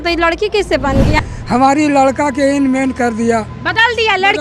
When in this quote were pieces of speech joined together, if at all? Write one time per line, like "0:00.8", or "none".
0:01.2

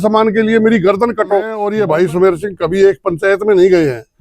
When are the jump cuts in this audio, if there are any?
0:01.5

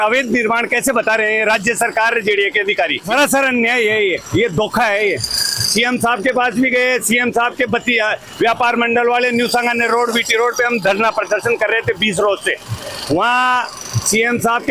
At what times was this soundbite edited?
none

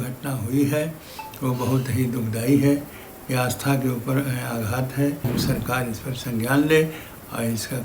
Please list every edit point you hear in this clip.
0:05.3

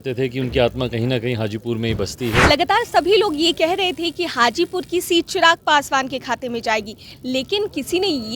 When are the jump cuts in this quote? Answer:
0:02.4

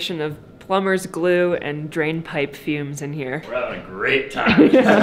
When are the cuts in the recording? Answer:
0:03.4

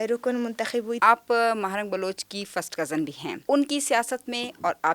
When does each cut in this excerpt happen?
0:01.0
0:03.4

